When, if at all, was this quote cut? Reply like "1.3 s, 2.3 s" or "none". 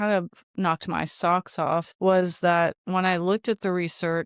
1.9 s